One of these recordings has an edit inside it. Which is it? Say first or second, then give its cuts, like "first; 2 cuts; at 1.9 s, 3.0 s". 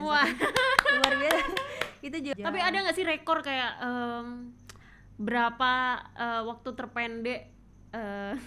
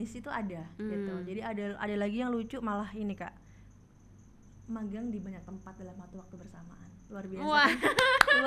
first; 1 cut; at 2.3 s